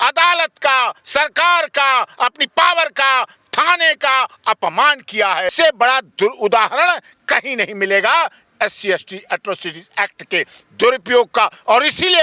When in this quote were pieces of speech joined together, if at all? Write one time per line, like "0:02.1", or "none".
0:05.5